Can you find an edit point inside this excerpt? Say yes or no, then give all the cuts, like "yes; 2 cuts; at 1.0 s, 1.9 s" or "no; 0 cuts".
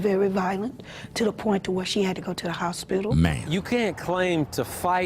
yes; 1 cut; at 3.3 s